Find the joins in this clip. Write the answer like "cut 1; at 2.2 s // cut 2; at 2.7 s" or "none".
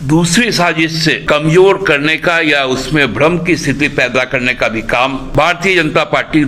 cut 1; at 1.2 s // cut 2; at 5.3 s